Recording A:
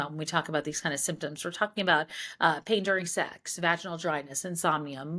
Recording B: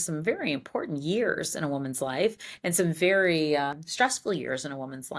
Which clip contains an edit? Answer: B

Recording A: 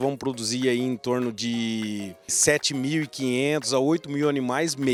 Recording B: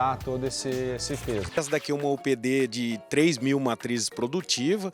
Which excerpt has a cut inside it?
B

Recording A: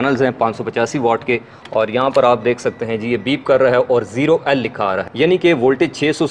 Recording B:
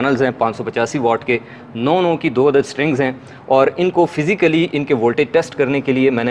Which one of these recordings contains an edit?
A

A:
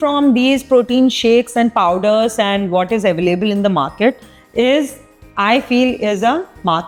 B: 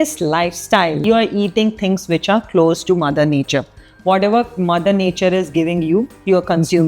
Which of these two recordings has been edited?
B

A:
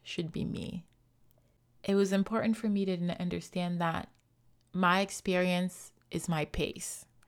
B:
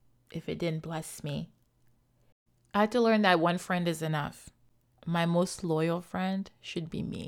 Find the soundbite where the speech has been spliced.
B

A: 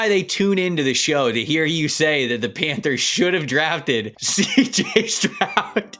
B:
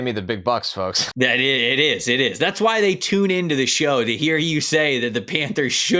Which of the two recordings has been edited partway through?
A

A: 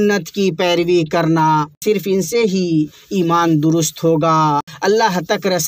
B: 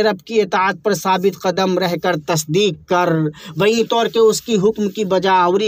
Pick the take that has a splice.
A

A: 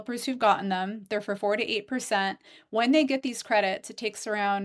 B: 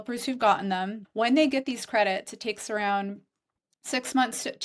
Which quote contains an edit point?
B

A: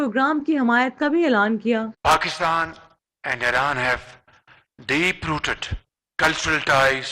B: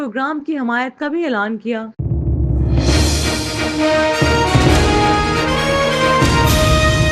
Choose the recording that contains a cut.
B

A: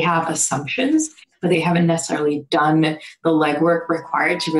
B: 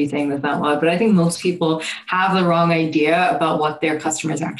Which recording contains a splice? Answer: A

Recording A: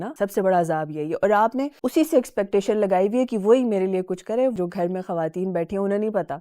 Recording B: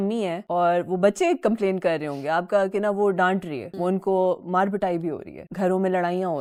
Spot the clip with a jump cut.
A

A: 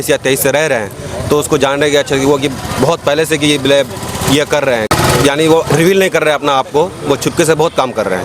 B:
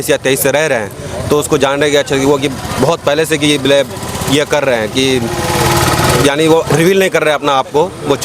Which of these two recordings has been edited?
A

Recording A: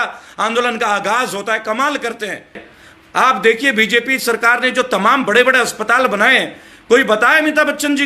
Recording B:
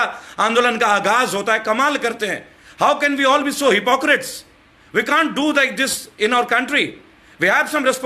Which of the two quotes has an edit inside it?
A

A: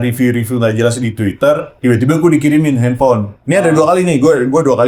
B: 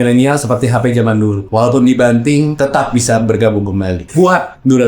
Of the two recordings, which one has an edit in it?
B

